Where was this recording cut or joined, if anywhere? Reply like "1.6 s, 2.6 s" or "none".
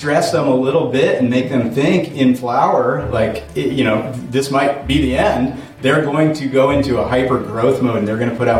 none